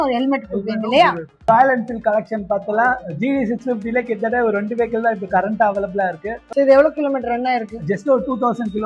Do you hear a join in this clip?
yes; 2 cuts; at 1.5 s, 6.3 s

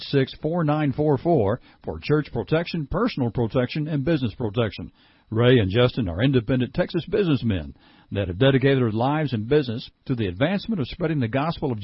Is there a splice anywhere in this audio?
no; 0 cuts

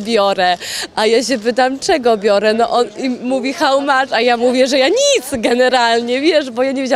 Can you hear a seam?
no; 0 cuts

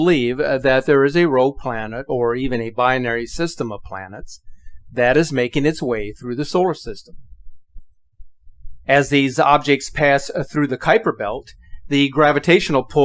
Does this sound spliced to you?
no; 0 cuts

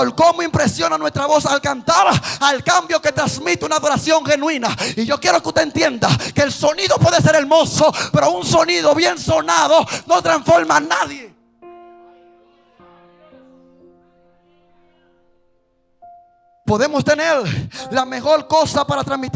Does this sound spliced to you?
no; 0 cuts

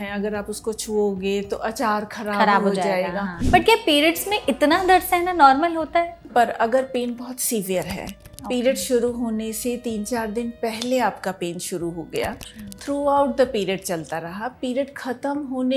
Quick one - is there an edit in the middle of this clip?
yes; 2 cuts; at 3.4 s, 6.1 s

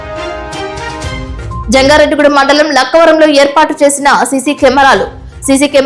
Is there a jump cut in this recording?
no; 0 cuts

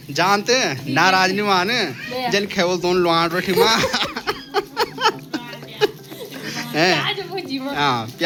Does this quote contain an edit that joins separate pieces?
no; 0 cuts

